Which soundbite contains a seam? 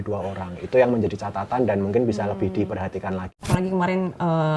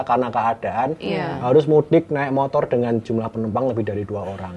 first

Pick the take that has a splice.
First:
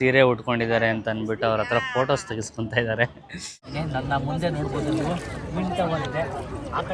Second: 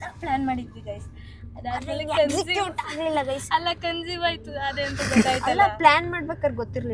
first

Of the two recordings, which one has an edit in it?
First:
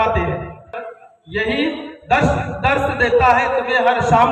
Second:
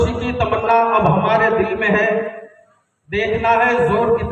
first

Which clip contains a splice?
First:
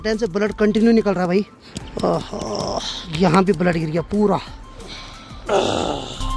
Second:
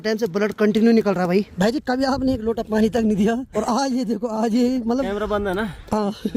second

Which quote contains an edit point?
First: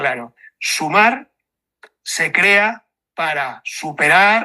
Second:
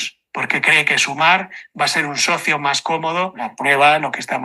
second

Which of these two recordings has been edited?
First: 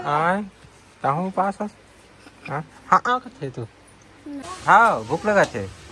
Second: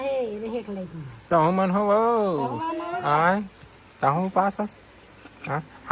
first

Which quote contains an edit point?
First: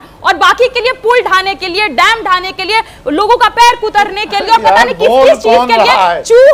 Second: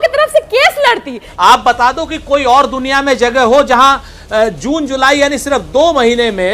second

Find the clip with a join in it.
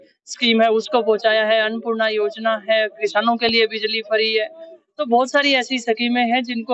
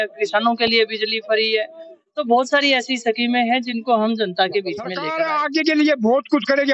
second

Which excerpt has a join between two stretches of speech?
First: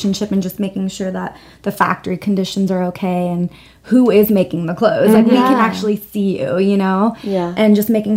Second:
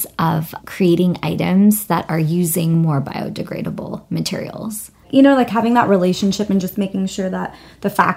second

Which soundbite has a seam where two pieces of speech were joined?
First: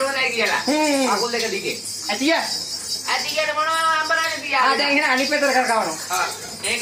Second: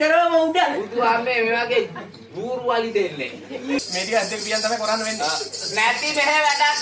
second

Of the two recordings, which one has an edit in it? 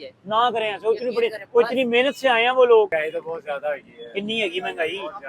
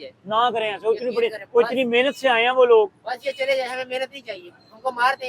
first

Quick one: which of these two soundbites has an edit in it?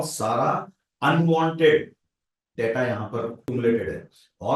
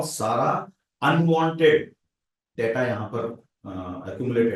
first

